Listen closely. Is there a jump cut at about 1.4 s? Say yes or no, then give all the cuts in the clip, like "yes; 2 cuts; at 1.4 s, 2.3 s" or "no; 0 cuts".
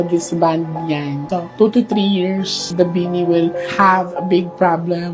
no; 1 cut; at 2.8 s